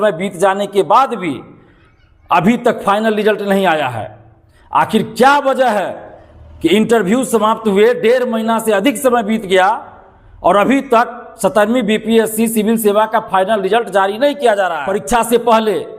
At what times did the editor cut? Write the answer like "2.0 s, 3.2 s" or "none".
14.9 s